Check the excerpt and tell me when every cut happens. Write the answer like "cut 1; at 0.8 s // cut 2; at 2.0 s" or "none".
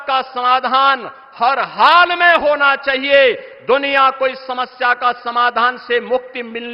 none